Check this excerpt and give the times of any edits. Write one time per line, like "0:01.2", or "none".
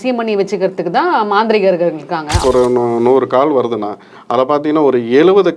0:02.4